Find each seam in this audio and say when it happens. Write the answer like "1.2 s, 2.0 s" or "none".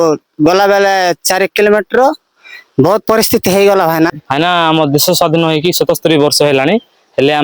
4.2 s